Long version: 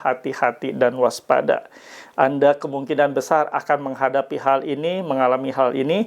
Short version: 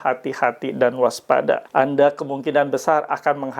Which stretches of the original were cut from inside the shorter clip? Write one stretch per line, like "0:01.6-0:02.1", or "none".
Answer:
0:01.7-0:02.1